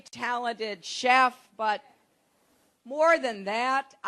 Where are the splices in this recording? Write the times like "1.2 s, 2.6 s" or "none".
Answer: none